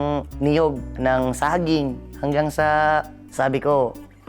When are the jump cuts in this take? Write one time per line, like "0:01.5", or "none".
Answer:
0:00.9
0:02.1